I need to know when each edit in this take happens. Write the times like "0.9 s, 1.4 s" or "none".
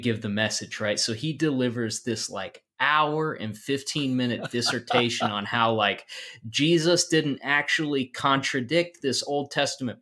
none